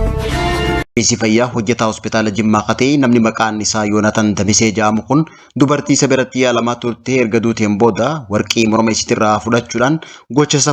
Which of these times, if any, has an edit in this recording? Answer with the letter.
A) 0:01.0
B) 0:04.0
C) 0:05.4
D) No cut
A